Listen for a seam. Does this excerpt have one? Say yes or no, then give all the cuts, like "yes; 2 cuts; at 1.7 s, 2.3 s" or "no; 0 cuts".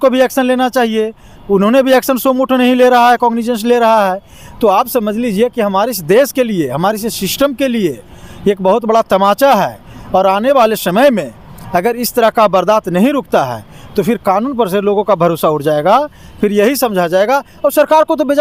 no; 0 cuts